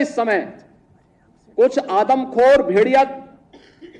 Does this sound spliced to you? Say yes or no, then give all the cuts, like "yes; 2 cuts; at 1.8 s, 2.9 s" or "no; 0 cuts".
no; 0 cuts